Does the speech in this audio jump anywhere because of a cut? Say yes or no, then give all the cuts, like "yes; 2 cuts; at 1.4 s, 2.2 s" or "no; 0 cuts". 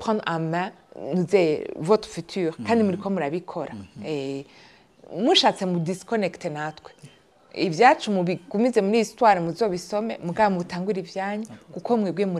no; 0 cuts